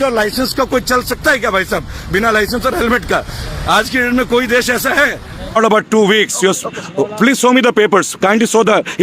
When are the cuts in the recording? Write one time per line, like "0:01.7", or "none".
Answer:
0:05.6

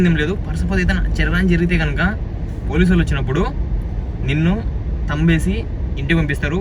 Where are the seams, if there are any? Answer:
none

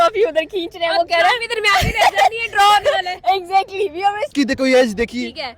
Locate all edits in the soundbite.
0:04.3

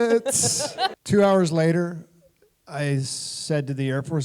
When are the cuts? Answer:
0:01.0

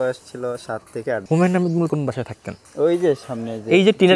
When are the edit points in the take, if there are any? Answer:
0:01.2
0:01.9

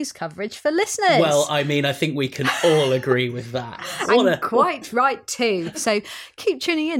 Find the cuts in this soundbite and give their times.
0:05.7

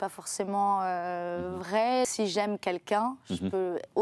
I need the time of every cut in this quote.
0:02.1

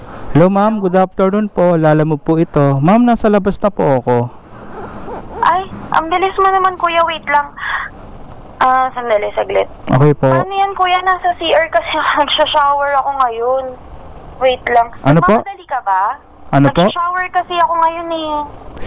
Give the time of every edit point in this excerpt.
none

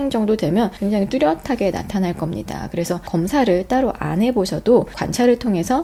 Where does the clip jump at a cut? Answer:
none

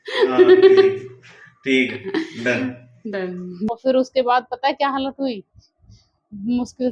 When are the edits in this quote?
0:03.7

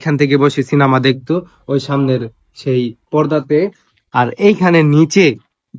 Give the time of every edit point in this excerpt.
none

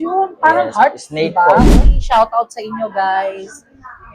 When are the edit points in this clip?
0:01.7

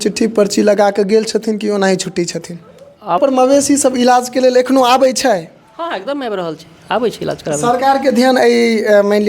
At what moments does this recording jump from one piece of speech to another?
0:03.2

